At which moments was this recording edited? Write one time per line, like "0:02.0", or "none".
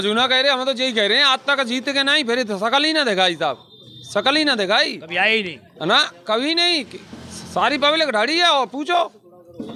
none